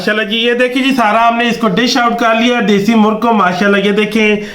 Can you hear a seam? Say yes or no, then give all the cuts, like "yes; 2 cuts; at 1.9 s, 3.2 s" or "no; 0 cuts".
no; 0 cuts